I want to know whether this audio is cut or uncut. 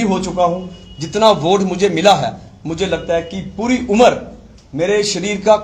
uncut